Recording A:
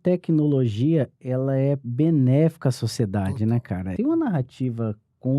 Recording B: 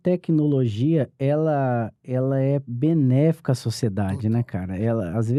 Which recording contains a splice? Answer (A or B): A